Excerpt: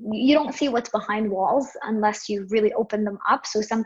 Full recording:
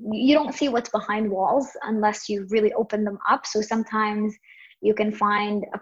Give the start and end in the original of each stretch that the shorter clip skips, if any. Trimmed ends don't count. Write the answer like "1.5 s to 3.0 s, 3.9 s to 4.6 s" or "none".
none